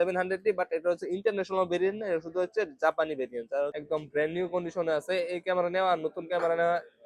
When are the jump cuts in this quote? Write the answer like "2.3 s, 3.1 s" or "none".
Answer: 3.8 s